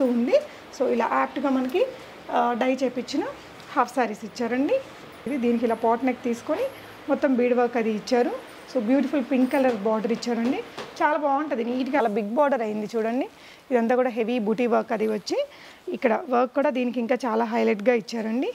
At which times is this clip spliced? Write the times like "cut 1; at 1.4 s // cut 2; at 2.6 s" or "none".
cut 1; at 5.3 s // cut 2; at 12.0 s